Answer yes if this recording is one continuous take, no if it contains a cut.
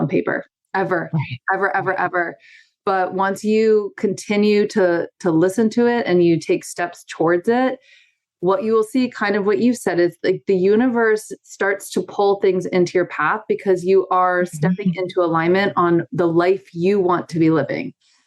yes